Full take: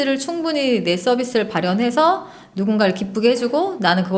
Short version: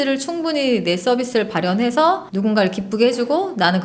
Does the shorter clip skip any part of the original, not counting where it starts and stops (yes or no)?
yes